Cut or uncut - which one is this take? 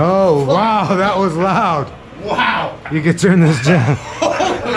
uncut